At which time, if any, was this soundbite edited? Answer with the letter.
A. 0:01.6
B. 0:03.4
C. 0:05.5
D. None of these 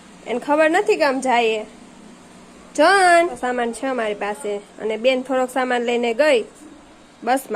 B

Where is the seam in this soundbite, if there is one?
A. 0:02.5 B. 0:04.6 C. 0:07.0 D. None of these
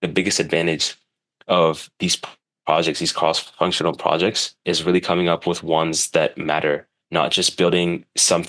D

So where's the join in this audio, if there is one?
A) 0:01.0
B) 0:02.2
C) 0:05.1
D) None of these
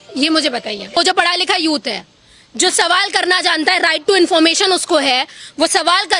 A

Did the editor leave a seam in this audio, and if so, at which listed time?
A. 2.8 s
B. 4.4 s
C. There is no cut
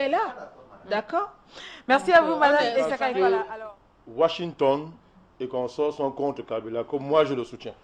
A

